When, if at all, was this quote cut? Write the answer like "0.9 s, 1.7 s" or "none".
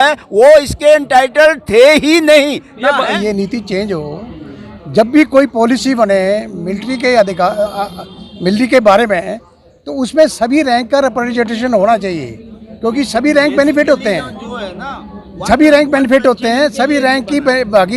3.1 s